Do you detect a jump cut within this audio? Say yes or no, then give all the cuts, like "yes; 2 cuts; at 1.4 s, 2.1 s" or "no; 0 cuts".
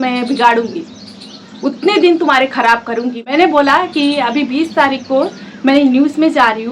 no; 0 cuts